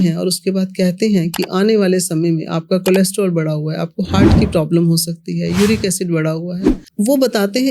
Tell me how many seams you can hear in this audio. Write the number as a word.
one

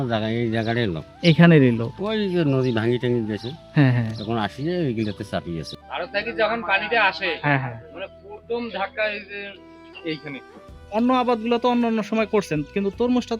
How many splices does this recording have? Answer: two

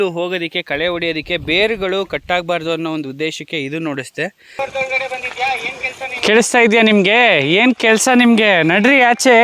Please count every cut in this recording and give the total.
one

